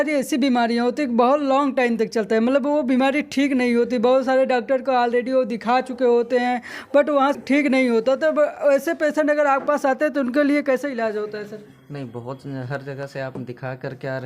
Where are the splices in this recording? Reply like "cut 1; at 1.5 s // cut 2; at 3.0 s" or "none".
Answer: cut 1; at 7.4 s